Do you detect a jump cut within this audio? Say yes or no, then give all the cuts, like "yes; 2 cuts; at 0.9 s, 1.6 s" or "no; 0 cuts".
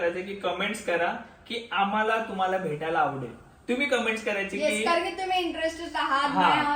no; 0 cuts